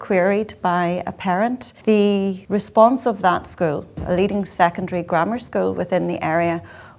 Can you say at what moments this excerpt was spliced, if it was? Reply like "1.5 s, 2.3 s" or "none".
1.7 s, 2.4 s, 4.0 s